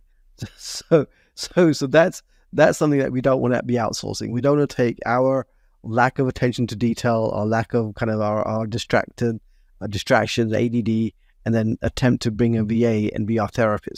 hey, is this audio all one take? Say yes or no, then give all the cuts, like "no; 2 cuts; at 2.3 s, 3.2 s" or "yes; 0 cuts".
yes; 0 cuts